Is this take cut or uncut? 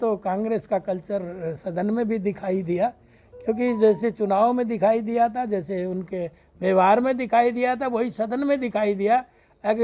uncut